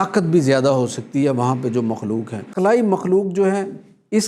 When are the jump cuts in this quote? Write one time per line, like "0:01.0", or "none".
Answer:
0:02.5

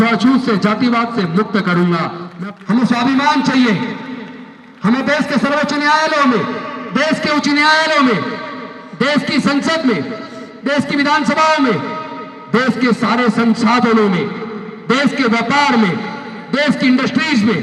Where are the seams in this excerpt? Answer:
0:02.2

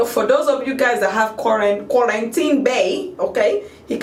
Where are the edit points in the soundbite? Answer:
none

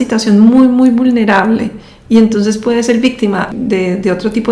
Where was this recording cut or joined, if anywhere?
0:03.5

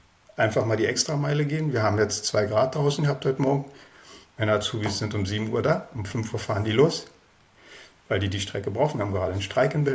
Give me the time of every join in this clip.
none

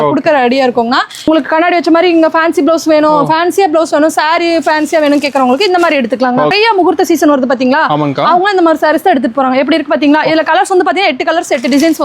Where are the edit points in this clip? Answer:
0:01.3
0:06.5

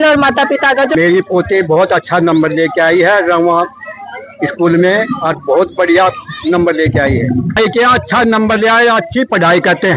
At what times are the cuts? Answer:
0:00.9
0:07.6

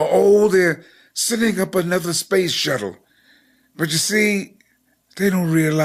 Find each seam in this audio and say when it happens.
0:02.9

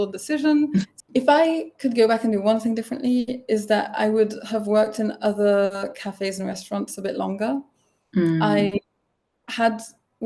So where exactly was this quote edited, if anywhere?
0:00.9

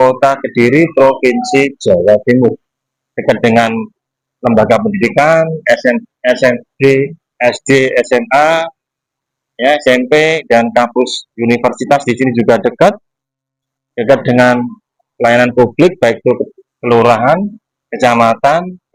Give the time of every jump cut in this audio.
none

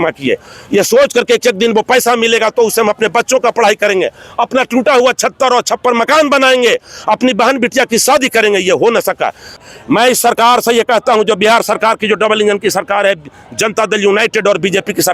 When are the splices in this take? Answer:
0:09.6

